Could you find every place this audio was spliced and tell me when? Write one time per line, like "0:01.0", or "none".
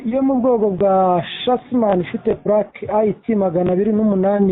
none